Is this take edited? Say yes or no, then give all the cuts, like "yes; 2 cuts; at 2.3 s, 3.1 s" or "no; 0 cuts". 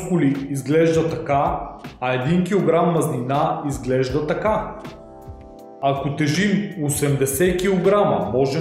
no; 0 cuts